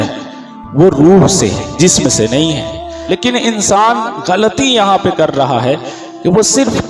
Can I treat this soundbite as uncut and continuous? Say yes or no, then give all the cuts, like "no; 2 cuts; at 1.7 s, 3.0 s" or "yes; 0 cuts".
no; 1 cut; at 2.9 s